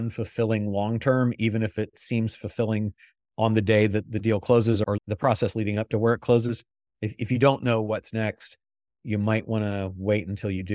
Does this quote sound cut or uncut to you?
cut